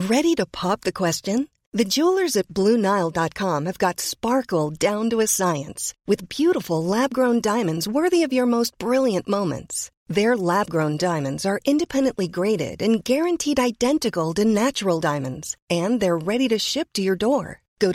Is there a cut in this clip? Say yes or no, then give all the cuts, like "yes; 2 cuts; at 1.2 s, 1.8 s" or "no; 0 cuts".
no; 0 cuts